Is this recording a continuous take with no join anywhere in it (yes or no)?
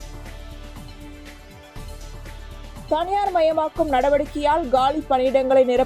no